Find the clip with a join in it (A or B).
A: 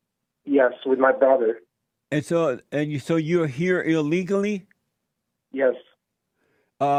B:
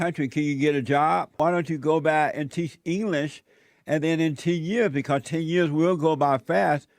B